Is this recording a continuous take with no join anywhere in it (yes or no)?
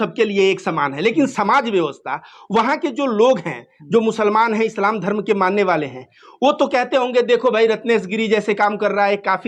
yes